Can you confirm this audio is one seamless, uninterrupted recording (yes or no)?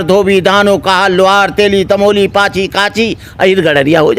yes